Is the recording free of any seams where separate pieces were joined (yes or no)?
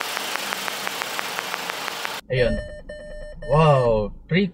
no